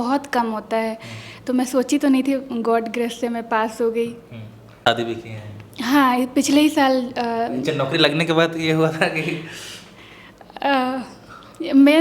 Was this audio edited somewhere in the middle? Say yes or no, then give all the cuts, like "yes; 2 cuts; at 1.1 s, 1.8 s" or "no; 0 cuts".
yes; 1 cut; at 4.8 s